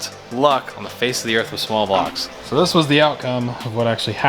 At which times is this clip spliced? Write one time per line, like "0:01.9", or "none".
0:02.2

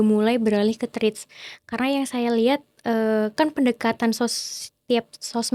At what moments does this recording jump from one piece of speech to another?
none

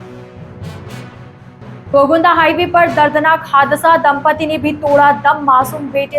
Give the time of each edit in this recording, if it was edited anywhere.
0:01.7

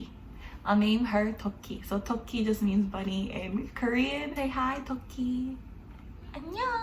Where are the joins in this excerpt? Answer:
0:04.3

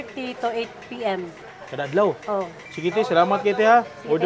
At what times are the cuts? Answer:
0:01.5
0:02.6

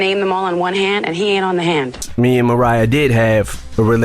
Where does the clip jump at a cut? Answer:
0:02.0

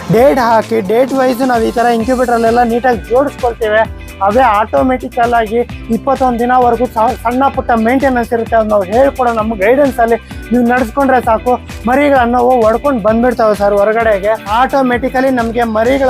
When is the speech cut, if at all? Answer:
0:14.5

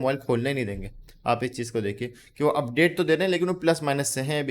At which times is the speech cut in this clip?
none

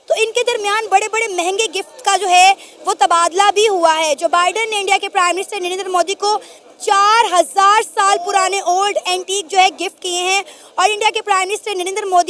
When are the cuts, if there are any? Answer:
none

